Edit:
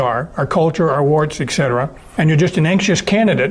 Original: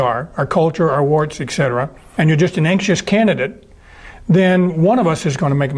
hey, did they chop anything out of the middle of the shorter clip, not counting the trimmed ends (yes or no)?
no